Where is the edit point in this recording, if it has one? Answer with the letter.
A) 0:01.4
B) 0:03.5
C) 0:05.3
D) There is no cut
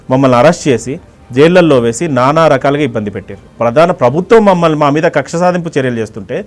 B